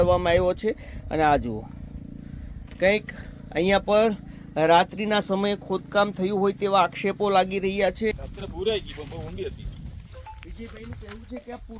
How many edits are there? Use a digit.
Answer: 1